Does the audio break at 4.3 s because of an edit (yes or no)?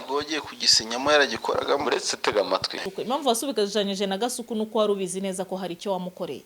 no